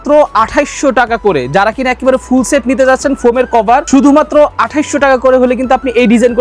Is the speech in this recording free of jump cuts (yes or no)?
no